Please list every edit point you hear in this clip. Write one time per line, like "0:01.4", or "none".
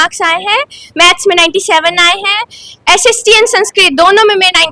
none